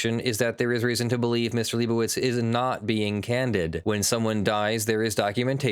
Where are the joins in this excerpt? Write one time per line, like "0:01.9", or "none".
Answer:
0:03.8